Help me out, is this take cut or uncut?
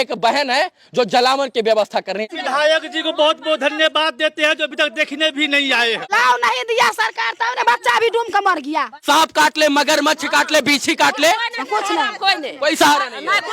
cut